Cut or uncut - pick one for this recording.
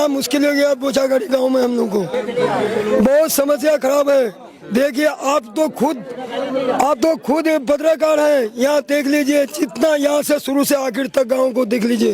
uncut